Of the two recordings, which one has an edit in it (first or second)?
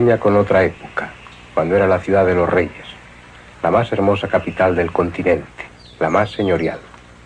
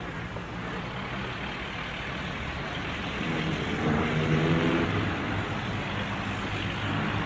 first